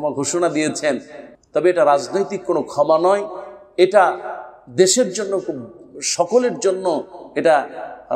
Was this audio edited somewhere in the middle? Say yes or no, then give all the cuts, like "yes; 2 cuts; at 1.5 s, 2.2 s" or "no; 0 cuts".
no; 0 cuts